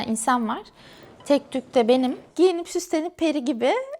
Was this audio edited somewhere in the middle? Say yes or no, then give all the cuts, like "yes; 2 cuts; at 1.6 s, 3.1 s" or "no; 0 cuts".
yes; 1 cut; at 2.2 s